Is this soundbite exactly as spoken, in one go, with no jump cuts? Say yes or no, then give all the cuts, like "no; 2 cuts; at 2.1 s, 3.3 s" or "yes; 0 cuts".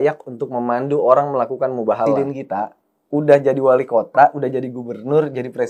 no; 1 cut; at 2.2 s